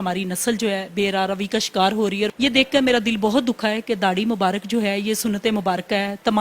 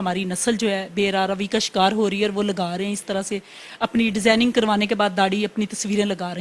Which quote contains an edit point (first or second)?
first